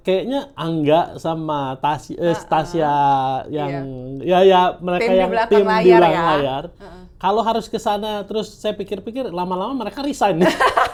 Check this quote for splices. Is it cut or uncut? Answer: uncut